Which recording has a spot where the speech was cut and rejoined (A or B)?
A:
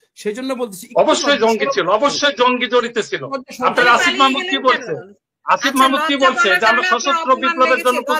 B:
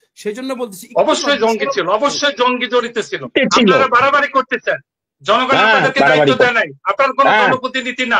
B